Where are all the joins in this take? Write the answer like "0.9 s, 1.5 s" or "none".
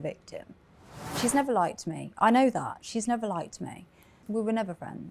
1.1 s, 4.1 s